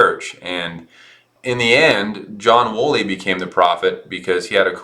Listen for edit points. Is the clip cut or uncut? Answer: cut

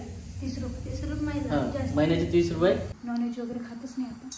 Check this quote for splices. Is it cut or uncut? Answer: cut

